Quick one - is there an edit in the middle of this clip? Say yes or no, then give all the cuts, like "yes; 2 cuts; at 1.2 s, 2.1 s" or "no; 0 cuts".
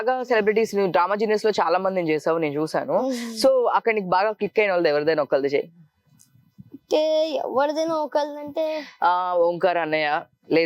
no; 0 cuts